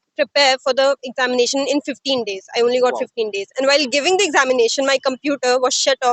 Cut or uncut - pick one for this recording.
uncut